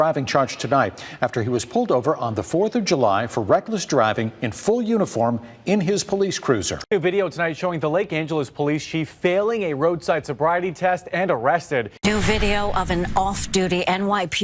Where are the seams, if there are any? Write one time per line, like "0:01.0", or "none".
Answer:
0:06.8
0:11.9